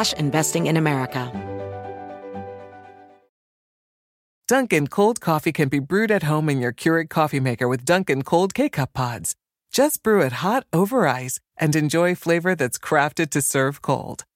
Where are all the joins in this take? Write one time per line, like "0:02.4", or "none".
0:01.5